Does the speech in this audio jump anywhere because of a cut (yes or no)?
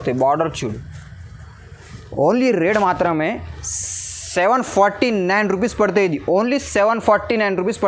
no